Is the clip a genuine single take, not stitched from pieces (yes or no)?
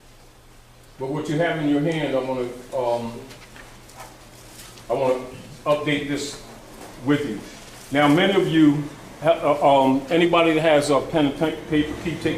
no